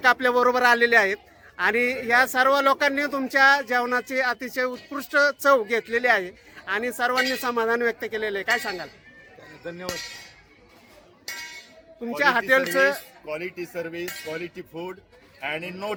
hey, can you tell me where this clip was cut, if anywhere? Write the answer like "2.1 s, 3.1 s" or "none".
none